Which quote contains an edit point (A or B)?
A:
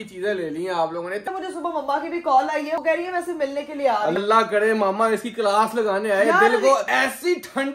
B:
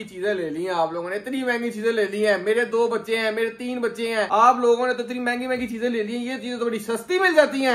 A